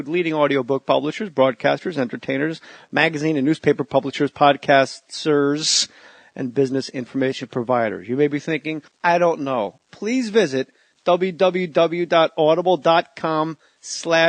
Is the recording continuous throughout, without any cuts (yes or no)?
yes